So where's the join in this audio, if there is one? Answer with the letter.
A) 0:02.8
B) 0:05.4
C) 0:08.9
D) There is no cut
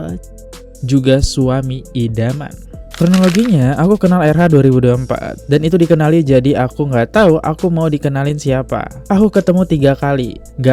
A